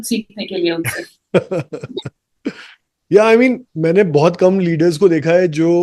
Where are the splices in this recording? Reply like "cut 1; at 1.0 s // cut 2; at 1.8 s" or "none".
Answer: none

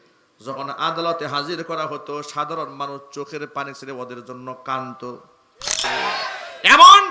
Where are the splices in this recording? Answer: cut 1; at 5.8 s

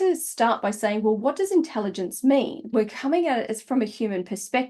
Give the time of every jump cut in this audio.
cut 1; at 2.7 s

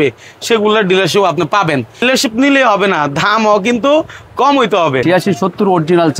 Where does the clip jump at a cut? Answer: cut 1; at 2.0 s // cut 2; at 5.0 s

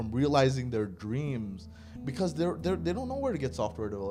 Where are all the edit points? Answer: none

